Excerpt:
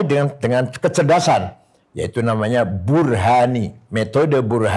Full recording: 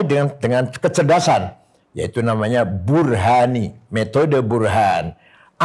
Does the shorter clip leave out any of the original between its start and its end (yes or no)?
no